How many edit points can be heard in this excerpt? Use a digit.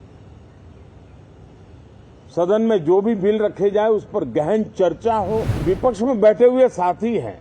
1